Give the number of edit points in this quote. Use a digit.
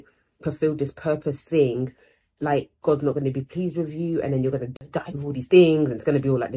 1